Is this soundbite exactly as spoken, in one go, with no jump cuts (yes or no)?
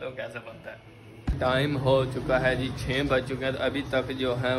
no